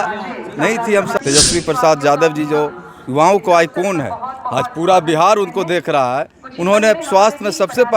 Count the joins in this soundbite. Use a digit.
1